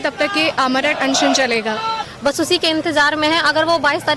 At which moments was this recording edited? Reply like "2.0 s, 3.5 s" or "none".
2.0 s